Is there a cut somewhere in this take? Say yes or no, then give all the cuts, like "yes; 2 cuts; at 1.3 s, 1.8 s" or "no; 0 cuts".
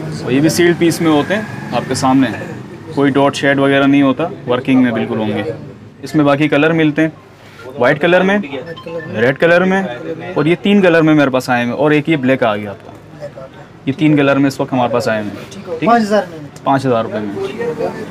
no; 0 cuts